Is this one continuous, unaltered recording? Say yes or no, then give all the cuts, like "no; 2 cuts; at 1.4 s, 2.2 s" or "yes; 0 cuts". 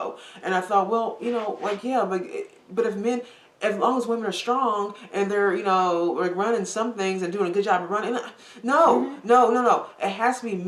yes; 0 cuts